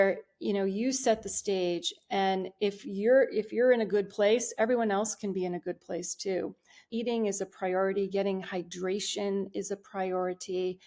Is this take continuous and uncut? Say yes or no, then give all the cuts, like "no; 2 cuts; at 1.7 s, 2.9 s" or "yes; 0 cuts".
no; 1 cut; at 6.9 s